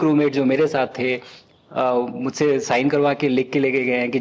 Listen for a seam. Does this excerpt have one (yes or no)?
no